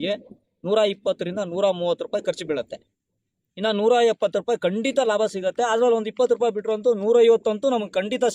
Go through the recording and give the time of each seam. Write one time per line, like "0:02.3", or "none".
none